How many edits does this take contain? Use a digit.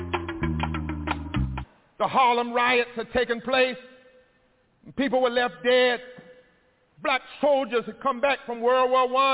1